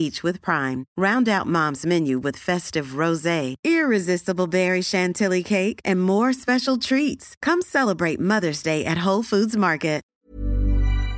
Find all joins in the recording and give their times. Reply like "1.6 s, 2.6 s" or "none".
10.0 s